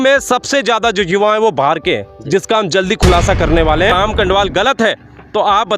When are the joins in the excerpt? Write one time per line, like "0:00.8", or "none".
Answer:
0:03.9